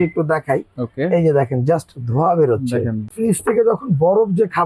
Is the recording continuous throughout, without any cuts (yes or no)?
no